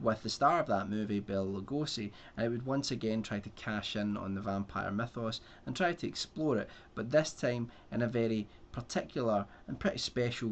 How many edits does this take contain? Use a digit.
1